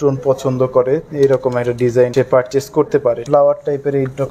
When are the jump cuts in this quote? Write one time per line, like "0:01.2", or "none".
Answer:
0:02.1
0:03.2

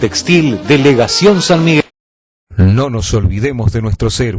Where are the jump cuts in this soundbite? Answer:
0:01.8

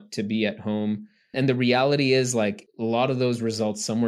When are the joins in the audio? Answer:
0:01.3
0:02.7

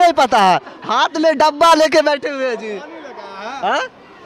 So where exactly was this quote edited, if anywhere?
none

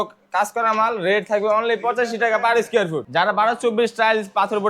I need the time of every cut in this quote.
0:03.0

